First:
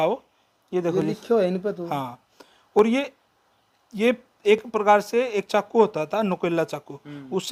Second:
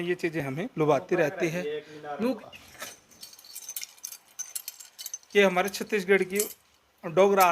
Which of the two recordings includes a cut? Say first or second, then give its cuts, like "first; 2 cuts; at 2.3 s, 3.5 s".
second; 1 cut; at 2.1 s